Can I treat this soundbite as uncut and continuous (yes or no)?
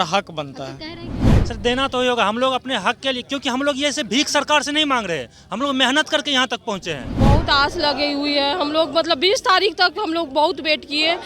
no